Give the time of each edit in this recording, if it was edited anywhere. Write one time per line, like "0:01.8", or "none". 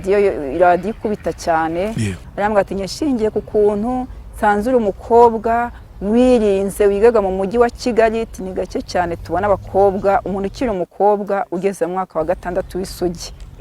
0:02.2